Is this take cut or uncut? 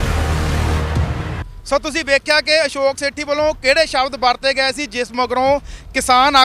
uncut